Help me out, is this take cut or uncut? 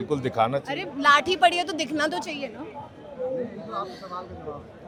uncut